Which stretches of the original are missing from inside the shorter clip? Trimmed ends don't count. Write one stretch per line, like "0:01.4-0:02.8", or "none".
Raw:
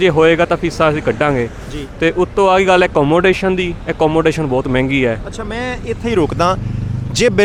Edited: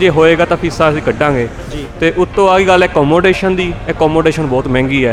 none